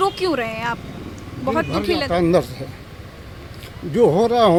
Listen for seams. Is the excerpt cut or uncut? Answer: uncut